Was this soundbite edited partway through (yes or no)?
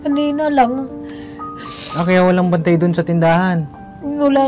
no